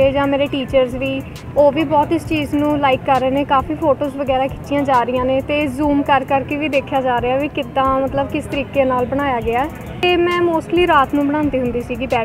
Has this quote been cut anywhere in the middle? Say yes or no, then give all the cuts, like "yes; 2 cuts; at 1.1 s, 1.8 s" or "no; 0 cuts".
yes; 1 cut; at 10.0 s